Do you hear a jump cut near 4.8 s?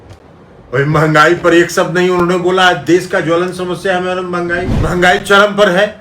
yes; 1 cut; at 4.8 s

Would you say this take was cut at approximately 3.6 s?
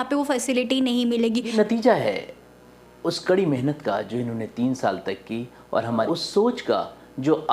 no; 2 cuts; at 1.5 s, 6.1 s

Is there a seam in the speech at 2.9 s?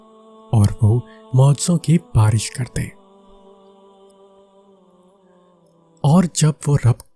yes; 2 cuts; at 2.9 s, 6.0 s

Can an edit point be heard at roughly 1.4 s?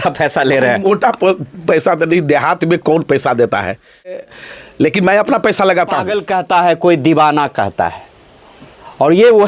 no; 2 cuts; at 4.2 s, 6.2 s

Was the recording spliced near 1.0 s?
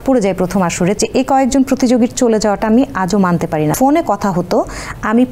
yes; 2 cuts; at 1.0 s, 3.7 s

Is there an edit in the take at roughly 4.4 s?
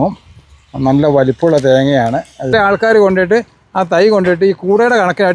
no; 1 cut; at 2.5 s

